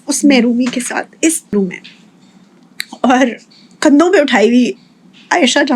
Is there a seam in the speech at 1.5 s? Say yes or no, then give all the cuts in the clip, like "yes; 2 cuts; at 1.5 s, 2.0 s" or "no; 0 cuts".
yes; 1 cut; at 1.5 s